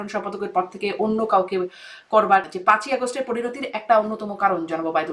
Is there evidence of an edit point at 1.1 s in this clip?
no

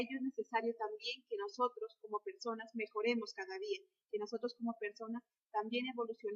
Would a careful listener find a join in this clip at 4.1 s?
yes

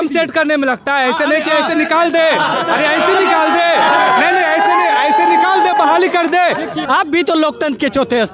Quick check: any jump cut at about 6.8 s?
yes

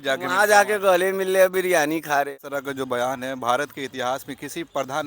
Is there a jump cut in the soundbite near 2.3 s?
yes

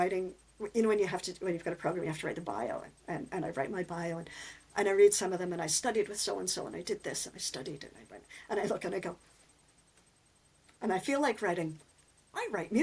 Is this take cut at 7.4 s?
no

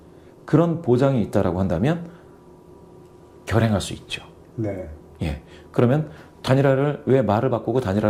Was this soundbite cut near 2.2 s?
no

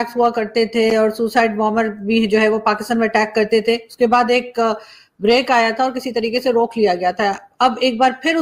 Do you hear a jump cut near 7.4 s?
no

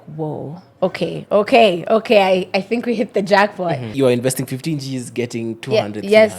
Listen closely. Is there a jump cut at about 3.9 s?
yes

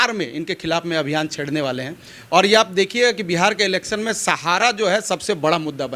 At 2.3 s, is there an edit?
no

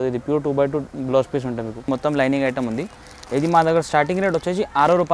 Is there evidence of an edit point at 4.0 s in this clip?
no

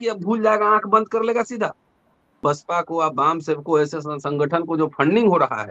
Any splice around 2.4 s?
yes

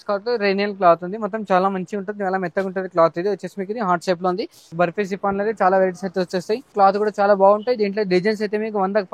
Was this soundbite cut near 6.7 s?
yes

